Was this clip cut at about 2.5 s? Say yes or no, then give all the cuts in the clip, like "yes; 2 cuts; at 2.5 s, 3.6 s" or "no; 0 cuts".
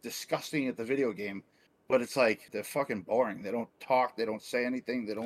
yes; 1 cut; at 2.5 s